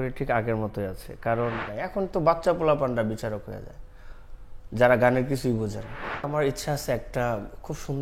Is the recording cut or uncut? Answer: cut